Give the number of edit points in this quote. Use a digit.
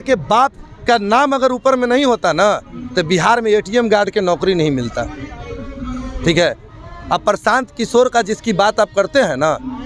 0